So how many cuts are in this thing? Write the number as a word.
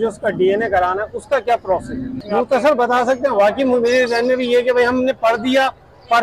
one